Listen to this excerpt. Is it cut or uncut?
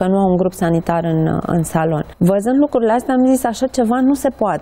cut